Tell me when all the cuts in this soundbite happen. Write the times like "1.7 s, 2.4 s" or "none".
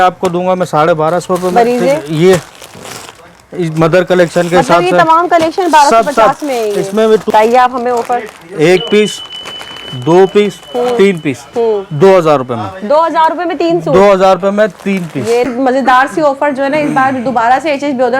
7.3 s, 15.5 s